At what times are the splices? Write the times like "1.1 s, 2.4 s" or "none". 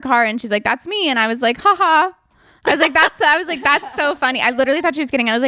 none